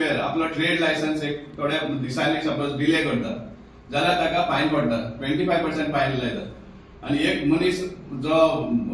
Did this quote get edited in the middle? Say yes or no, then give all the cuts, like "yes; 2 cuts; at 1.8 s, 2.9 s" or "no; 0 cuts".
no; 0 cuts